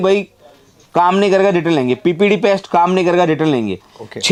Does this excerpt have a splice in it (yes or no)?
no